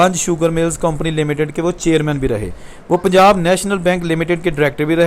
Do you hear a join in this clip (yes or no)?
no